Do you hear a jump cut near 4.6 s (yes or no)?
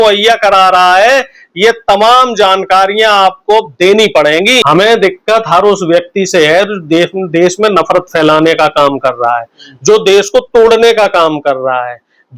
yes